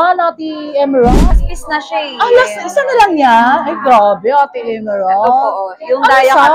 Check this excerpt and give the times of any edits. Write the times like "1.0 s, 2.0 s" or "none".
1.3 s